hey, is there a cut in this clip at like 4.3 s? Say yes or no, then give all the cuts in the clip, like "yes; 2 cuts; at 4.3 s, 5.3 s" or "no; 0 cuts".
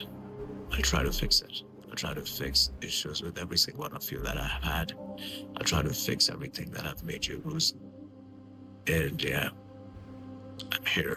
no; 0 cuts